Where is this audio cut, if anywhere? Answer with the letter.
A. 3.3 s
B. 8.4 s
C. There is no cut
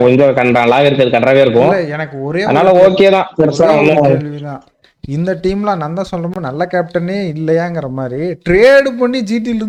C